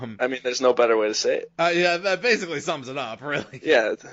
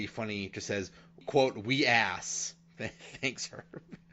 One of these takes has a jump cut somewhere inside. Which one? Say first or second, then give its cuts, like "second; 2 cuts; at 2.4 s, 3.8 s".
second; 1 cut; at 1.2 s